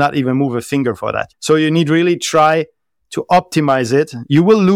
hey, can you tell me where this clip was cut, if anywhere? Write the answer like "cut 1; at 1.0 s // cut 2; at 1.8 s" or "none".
cut 1; at 1.3 s

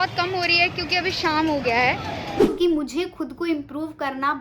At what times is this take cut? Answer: cut 1; at 2.4 s

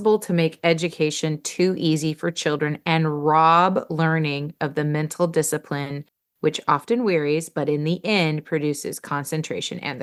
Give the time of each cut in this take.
none

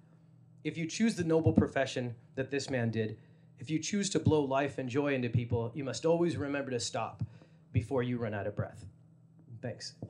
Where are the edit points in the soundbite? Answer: none

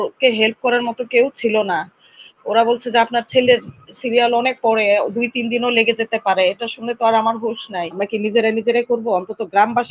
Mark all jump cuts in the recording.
cut 1; at 7.9 s

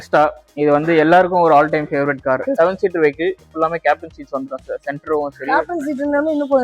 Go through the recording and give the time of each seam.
cut 1; at 2.5 s

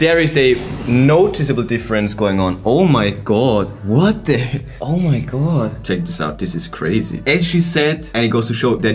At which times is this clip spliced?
none

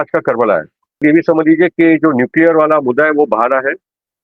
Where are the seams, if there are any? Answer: cut 1; at 1.0 s

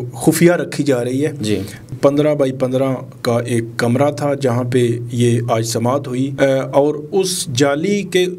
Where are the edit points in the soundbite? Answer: cut 1; at 1.8 s // cut 2; at 6.3 s

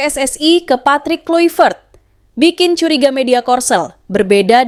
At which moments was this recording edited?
none

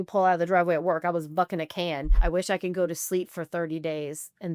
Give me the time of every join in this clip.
cut 1; at 2.2 s

